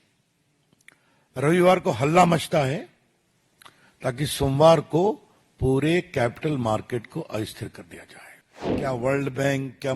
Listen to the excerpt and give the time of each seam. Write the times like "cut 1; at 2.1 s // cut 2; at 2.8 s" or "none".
cut 1; at 8.8 s